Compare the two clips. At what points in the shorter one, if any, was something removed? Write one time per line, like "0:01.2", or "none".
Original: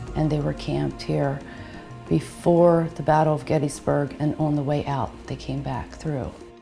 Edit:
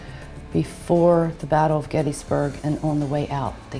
none